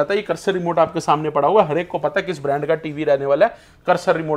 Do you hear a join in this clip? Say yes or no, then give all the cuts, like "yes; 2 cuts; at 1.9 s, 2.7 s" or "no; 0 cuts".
no; 0 cuts